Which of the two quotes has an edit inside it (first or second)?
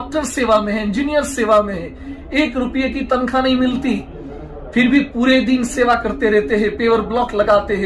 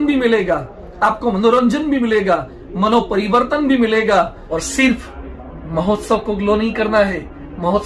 second